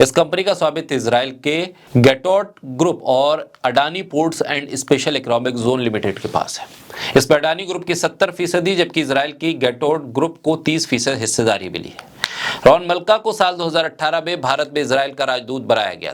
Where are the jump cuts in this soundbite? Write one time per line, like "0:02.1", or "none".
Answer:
0:01.8